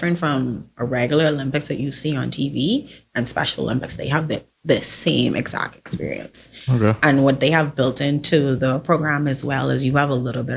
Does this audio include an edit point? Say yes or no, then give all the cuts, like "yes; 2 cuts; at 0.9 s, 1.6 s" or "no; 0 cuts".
no; 0 cuts